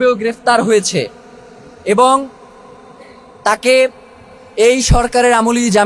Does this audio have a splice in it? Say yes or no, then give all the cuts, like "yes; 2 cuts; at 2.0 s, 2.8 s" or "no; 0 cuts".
no; 0 cuts